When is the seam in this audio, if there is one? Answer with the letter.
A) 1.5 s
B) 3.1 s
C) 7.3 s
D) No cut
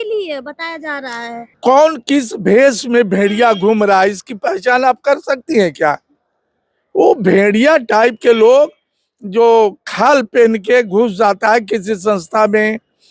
A